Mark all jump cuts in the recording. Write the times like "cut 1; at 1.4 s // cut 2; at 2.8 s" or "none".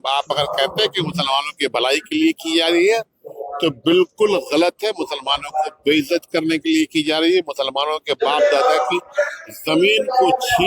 none